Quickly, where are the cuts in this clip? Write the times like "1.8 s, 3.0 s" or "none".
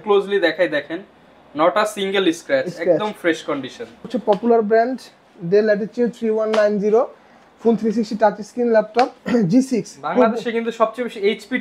4.0 s, 9.2 s